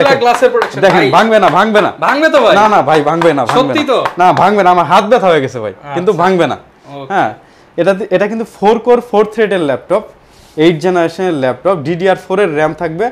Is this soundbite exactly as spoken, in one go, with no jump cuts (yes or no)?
yes